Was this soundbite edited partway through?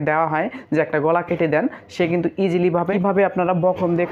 yes; 1 cut; at 2.9 s

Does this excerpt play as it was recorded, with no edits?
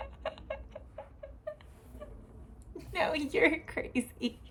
yes; 0 cuts

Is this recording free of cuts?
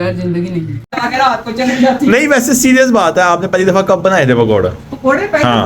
no; 1 cut; at 1.0 s

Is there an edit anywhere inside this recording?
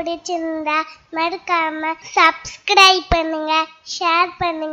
yes; 1 cut; at 2.0 s

